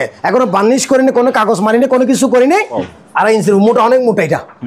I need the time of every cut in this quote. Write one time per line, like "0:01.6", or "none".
0:02.9